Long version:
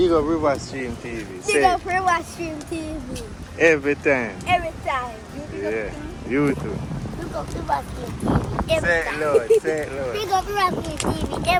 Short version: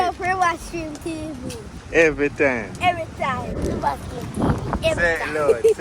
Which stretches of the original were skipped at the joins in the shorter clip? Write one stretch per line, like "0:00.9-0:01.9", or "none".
0:05.3-0:07.5